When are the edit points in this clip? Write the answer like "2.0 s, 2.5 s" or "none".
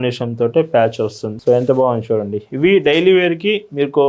1.3 s